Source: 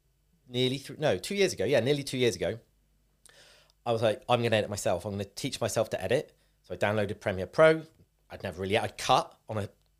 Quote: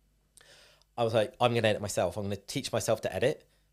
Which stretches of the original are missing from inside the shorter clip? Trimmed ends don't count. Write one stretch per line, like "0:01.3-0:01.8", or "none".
none